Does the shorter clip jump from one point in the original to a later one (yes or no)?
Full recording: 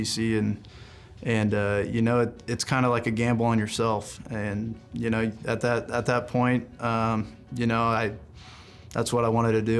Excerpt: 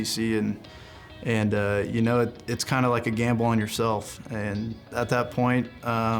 yes